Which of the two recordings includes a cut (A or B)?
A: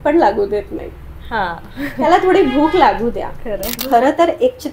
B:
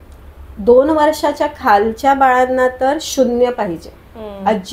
A